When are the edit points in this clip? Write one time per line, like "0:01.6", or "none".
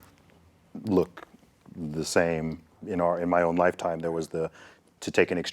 0:02.8